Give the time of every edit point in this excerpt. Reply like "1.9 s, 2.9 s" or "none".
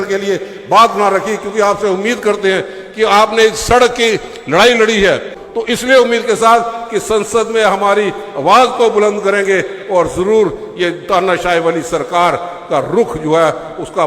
5.4 s